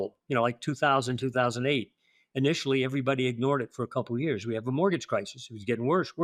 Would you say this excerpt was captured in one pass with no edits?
yes; 0 cuts

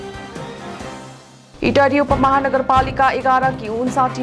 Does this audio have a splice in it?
yes; 1 cut; at 1.3 s

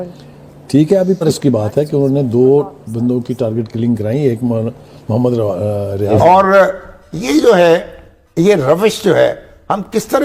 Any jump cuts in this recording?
yes; 2 cuts; at 1.2 s, 6.1 s

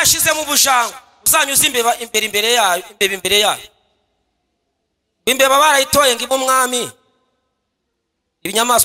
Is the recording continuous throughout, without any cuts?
yes; 0 cuts

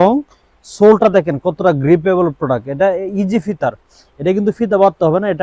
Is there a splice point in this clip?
no; 0 cuts

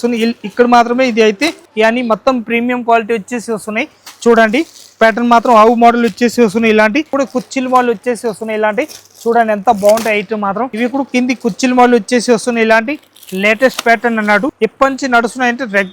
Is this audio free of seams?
no; 4 cuts; at 1.6 s, 7.1 s, 10.7 s, 14.5 s

